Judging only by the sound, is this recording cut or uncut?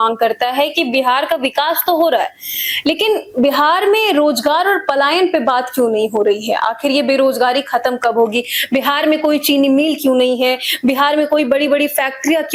uncut